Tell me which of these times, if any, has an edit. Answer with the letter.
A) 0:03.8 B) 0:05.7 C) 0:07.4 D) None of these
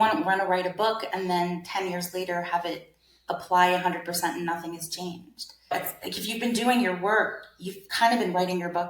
B